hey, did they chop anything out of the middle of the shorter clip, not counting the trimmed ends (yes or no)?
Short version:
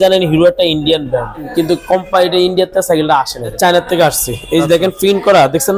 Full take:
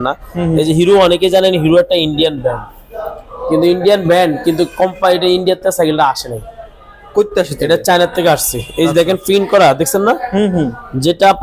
yes